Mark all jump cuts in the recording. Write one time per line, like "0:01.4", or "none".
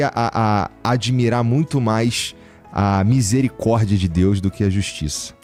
none